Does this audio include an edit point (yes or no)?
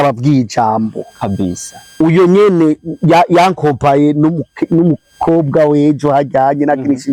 no